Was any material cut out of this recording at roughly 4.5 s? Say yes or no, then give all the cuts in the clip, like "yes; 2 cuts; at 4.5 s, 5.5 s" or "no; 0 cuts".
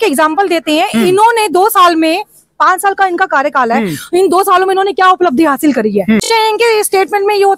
no; 1 cut; at 6.3 s